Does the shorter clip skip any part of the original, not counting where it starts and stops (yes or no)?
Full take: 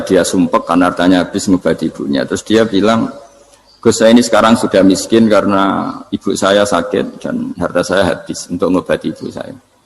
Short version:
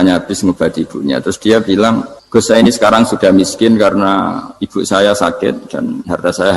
yes